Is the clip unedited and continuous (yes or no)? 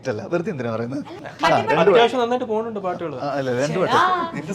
no